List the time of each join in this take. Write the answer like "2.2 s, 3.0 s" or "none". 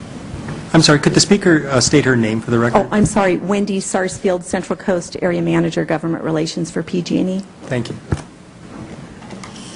none